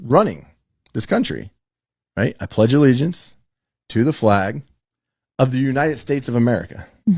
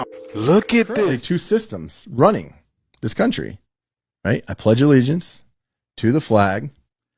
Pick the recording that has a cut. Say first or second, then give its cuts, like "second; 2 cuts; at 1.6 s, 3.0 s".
second; 1 cut; at 1.0 s